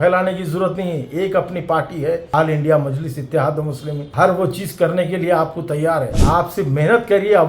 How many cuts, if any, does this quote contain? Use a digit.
1